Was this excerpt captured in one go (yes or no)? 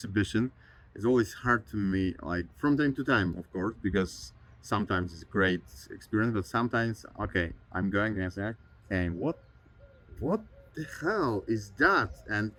yes